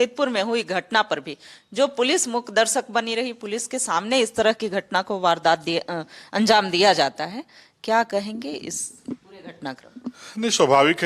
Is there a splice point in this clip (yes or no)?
no